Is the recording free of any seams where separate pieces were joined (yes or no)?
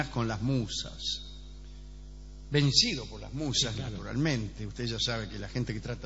no